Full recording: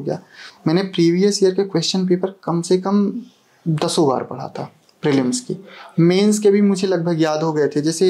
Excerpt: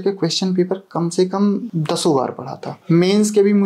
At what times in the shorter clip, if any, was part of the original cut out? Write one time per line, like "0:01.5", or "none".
0:01.7
0:02.7